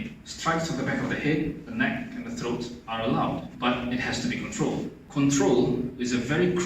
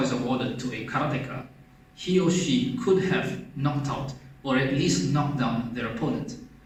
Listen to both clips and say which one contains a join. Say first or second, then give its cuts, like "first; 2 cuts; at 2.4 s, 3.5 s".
first; 2 cuts; at 3.5 s, 5.0 s